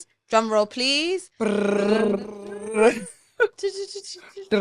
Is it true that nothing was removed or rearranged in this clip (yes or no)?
yes